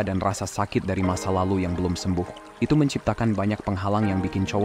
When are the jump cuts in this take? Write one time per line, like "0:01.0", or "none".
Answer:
0:02.4